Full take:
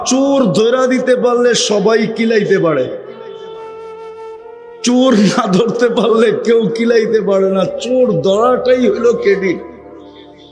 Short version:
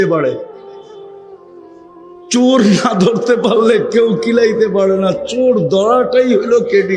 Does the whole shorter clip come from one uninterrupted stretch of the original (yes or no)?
yes